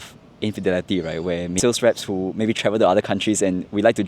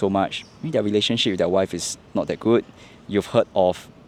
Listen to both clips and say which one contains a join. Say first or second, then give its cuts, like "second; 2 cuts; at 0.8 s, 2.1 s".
first; 1 cut; at 1.5 s